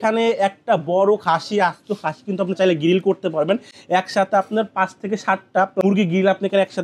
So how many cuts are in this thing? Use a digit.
1